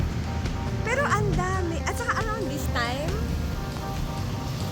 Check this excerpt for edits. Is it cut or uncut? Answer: uncut